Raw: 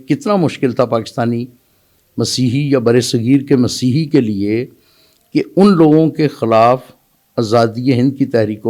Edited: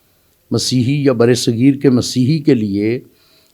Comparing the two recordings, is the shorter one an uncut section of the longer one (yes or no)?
yes